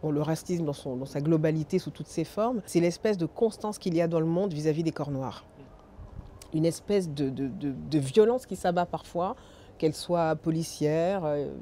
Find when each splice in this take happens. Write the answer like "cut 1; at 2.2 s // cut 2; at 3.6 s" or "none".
cut 1; at 2.6 s